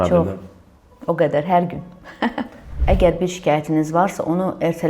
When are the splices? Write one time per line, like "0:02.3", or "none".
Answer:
0:02.8